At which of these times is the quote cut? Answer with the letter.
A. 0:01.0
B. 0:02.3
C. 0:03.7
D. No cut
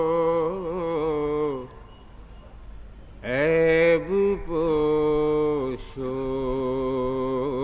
A